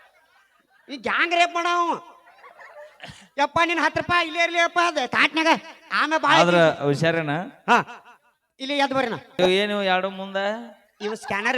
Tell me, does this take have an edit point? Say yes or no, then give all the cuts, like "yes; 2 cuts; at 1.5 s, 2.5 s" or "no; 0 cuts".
yes; 1 cut; at 9.4 s